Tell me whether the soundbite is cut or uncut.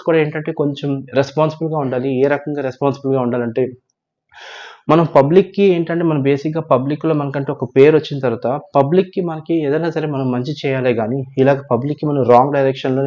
uncut